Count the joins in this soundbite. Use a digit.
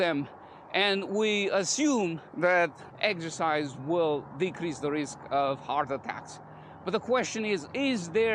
1